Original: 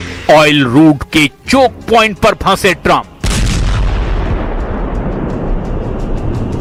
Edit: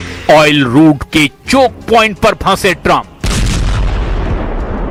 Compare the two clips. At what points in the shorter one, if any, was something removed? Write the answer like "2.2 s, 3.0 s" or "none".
none